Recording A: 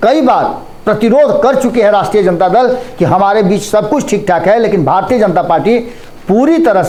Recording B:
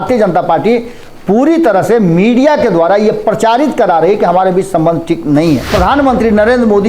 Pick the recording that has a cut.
B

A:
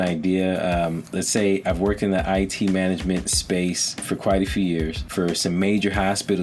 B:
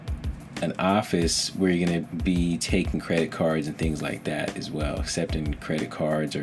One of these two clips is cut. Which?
A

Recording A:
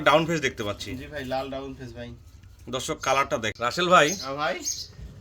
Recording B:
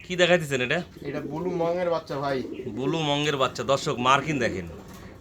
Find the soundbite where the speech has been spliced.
A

